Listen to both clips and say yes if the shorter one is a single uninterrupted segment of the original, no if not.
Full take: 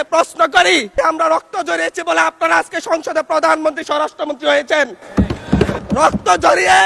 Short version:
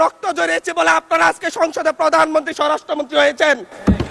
yes